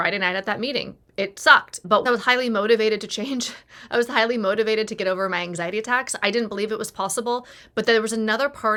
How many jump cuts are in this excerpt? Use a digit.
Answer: 0